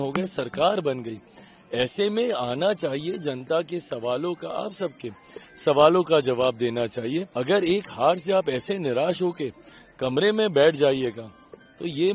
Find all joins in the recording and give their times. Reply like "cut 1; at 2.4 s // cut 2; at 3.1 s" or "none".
cut 1; at 7.3 s